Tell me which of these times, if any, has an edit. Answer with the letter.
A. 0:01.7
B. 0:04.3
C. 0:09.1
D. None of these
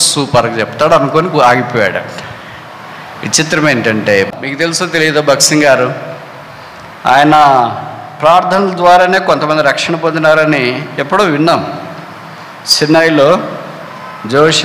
B